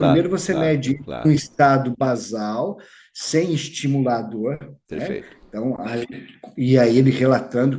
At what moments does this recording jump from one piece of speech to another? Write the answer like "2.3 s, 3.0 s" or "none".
none